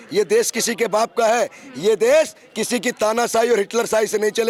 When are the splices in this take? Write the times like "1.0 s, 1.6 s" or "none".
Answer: none